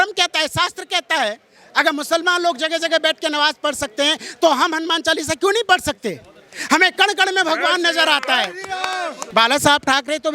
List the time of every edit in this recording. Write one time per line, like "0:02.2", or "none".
0:09.2